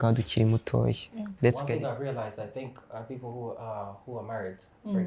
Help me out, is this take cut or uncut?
cut